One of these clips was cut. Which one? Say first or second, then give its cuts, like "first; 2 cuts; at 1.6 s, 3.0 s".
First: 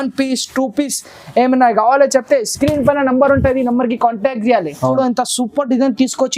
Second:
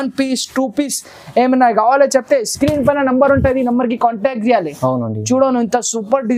first; 1 cut; at 4.9 s